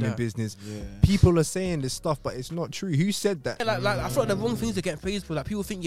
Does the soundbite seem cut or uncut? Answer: cut